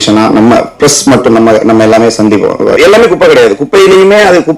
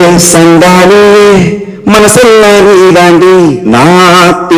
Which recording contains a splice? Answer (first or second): first